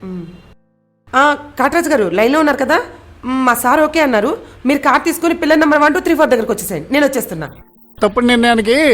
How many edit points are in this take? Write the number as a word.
one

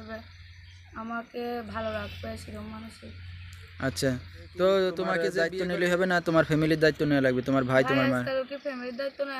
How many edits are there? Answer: one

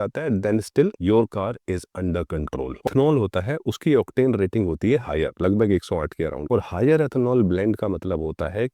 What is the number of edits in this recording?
one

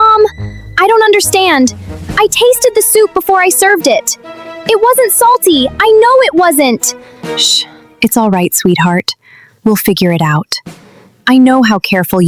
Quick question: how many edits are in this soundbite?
zero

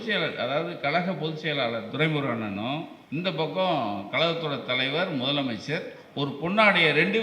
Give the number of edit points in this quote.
one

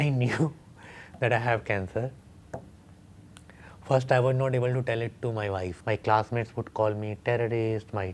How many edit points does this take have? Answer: one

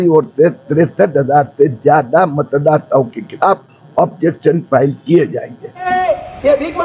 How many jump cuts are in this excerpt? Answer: one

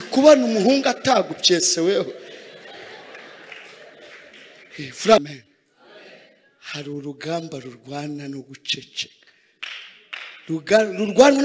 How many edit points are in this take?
one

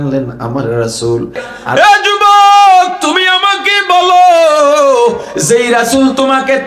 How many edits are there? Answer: one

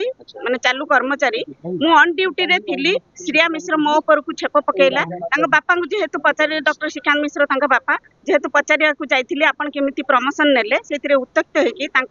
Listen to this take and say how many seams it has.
zero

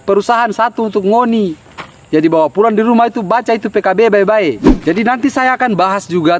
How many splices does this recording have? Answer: one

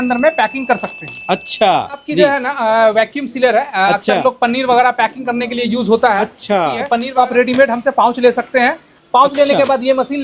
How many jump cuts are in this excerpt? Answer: two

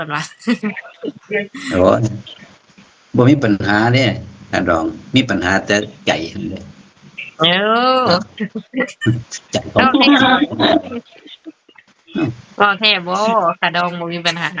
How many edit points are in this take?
zero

